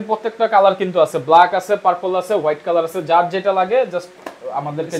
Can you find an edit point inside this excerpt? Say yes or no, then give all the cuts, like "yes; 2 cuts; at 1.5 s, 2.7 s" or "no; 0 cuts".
no; 0 cuts